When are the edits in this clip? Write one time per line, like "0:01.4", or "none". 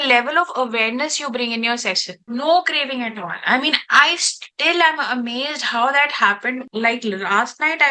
0:02.2